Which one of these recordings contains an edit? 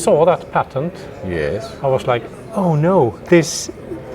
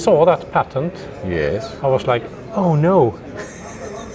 first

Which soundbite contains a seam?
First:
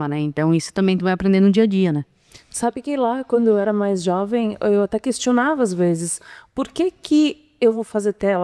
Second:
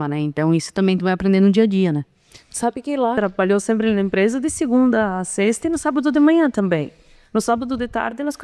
second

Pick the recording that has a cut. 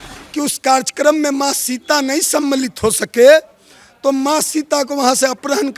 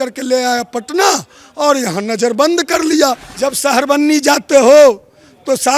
second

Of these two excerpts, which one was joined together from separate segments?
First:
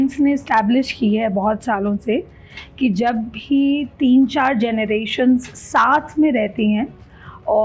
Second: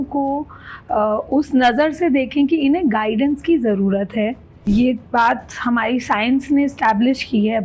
second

